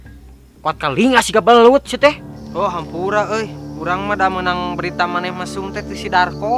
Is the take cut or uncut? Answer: cut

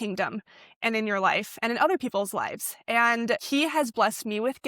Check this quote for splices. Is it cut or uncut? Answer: cut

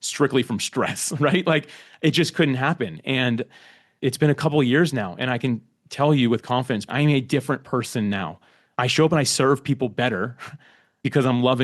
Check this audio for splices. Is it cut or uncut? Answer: cut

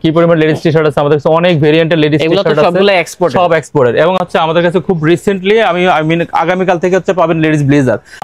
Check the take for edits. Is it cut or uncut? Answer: uncut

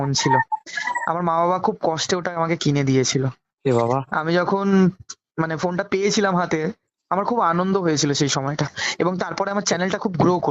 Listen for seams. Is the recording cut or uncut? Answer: uncut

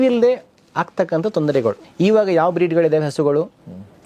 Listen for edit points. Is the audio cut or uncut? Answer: cut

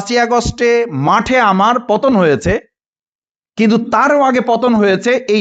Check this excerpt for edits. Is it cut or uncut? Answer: uncut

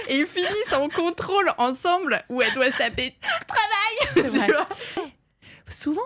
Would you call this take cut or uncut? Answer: cut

